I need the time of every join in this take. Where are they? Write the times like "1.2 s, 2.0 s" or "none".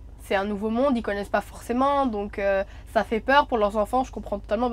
none